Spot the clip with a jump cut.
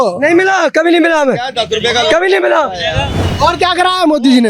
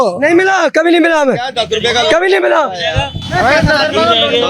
first; 1 cut; at 3.2 s

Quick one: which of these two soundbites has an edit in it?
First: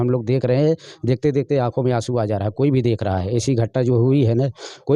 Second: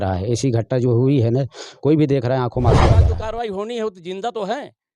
second; 1 cut; at 3.1 s

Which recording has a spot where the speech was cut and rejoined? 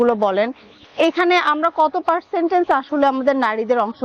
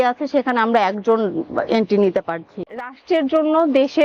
second; 1 cut; at 3.0 s

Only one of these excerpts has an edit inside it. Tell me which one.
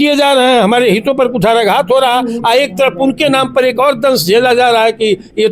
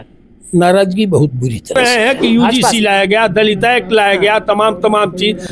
second; 1 cut; at 1.8 s

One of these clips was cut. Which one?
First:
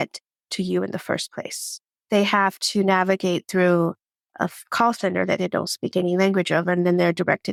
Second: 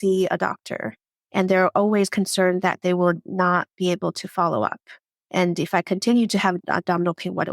second; 1 cut; at 6.6 s

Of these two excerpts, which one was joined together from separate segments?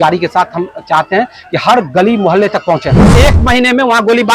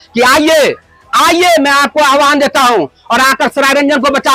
first; 1 cut; at 3.0 s

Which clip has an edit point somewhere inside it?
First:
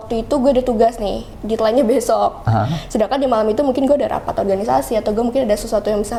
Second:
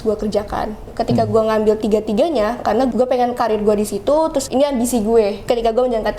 second; 4 cuts; at 0.9 s, 2.9 s, 4.4 s, 5.4 s

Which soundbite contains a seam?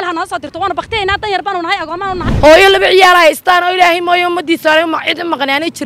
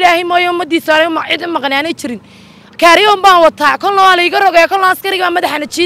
first; 1 cut; at 2.2 s

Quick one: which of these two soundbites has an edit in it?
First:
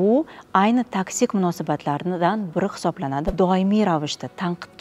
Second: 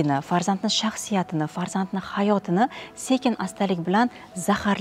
first; 1 cut; at 3.3 s

